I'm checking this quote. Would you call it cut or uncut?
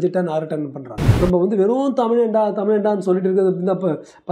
cut